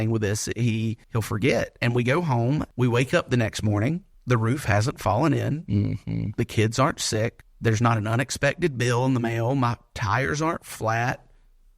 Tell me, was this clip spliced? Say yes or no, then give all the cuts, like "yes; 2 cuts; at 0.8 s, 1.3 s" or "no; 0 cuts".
yes; 4 cuts; at 1.0 s, 2.7 s, 4.1 s, 7.5 s